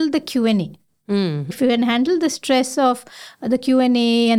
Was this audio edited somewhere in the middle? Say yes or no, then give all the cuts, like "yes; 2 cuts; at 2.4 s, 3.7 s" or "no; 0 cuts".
yes; 1 cut; at 1.5 s